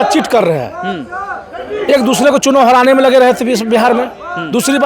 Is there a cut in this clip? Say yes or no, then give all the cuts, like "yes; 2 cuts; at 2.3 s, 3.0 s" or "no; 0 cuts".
no; 0 cuts